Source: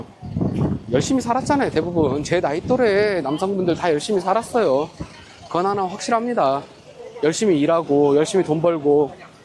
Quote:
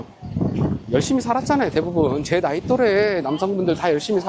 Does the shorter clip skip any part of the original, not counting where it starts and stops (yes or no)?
no